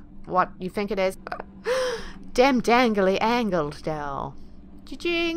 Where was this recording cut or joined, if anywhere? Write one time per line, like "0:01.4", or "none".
0:01.1